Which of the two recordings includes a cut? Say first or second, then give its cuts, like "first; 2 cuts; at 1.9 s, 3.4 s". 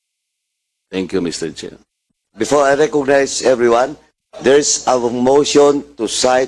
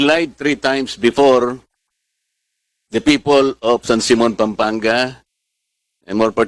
first; 1 cut; at 2.2 s